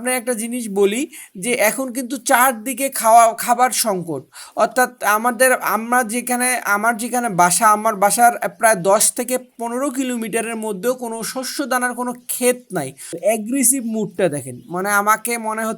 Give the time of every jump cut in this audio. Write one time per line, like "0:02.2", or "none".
0:13.2